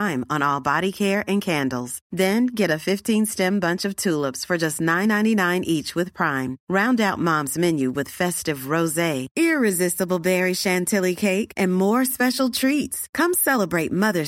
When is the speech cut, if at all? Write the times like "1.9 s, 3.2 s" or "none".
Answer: none